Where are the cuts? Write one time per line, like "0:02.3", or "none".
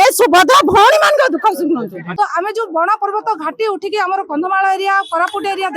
0:02.0